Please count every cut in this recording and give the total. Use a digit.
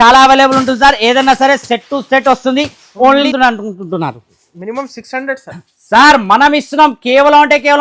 1